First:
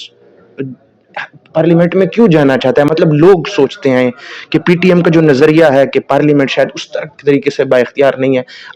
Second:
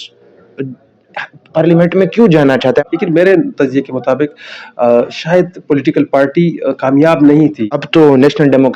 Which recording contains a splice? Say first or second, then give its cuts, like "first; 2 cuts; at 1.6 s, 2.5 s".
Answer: second; 2 cuts; at 2.8 s, 7.7 s